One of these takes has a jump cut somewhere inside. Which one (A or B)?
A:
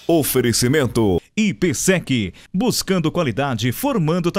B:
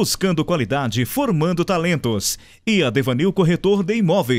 A